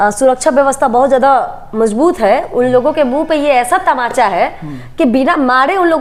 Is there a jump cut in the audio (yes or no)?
no